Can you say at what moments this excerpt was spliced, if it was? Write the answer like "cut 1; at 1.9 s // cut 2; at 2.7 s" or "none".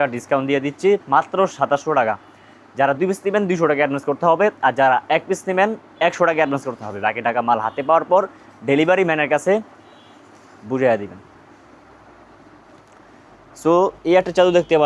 none